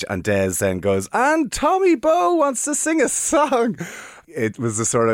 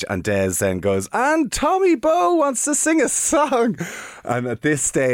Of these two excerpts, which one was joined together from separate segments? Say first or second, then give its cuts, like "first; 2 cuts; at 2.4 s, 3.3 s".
first; 1 cut; at 4.2 s